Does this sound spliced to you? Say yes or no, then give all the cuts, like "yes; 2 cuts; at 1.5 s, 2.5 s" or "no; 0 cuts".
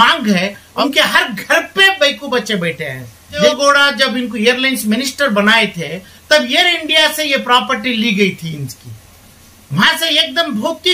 yes; 2 cuts; at 0.8 s, 3.4 s